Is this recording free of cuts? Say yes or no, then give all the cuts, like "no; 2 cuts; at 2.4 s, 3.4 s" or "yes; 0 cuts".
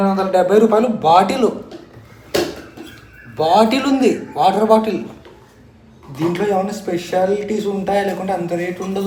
yes; 0 cuts